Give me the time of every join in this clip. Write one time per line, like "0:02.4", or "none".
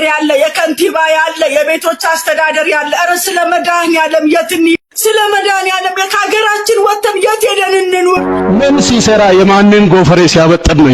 0:08.3